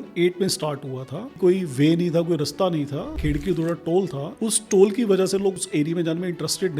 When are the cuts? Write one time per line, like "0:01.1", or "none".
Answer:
0:01.4
0:03.2
0:04.2
0:05.5